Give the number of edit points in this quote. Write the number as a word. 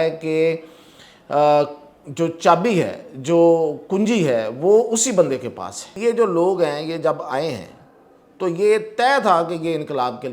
one